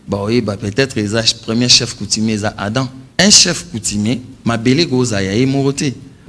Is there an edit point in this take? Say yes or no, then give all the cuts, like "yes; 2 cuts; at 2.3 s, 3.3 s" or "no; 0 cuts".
yes; 1 cut; at 3.0 s